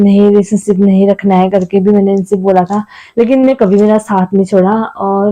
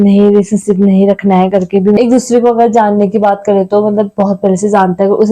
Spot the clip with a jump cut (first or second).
second